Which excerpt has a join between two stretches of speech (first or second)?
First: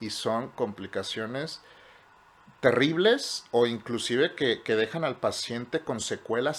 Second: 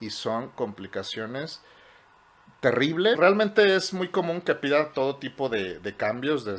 second